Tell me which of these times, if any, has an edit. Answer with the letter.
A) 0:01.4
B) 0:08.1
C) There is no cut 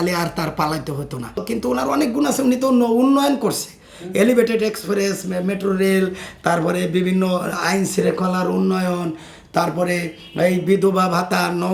A